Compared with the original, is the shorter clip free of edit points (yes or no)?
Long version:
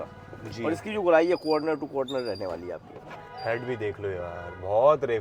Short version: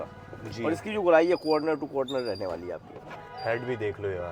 yes